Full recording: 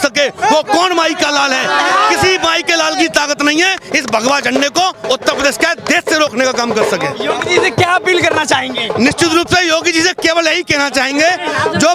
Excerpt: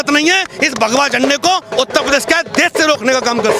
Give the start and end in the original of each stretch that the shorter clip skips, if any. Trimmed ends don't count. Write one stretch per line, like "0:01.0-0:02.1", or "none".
none